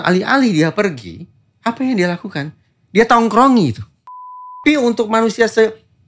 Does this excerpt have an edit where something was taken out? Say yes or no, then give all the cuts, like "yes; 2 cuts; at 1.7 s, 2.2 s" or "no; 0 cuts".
yes; 1 cut; at 4.6 s